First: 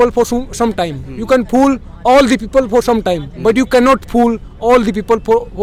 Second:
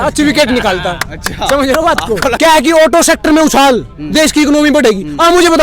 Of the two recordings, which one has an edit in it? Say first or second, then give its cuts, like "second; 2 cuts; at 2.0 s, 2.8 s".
second; 1 cut; at 2.4 s